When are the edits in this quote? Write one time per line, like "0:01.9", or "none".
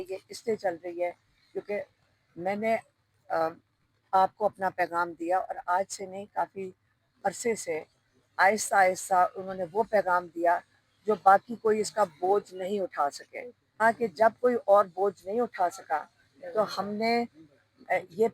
0:13.8